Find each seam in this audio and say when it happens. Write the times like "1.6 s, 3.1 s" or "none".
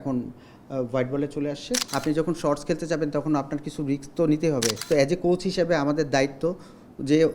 1.8 s, 4.8 s